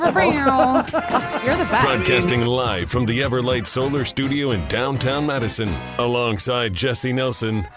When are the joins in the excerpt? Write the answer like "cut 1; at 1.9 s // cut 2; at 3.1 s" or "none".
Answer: cut 1; at 1.9 s